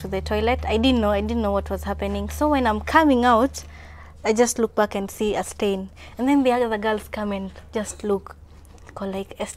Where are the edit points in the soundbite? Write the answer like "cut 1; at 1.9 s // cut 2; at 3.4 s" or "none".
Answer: none